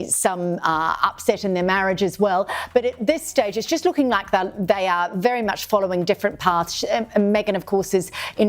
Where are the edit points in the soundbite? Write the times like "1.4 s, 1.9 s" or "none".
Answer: 7.5 s